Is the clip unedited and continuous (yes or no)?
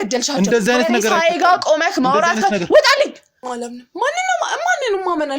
no